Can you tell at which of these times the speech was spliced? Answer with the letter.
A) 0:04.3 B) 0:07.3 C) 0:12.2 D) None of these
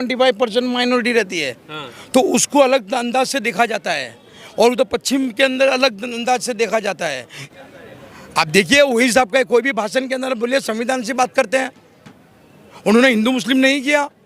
B